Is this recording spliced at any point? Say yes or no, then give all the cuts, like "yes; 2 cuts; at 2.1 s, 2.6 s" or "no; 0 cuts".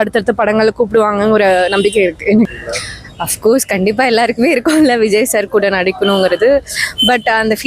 yes; 1 cut; at 2.5 s